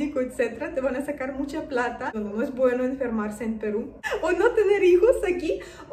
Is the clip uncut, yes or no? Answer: no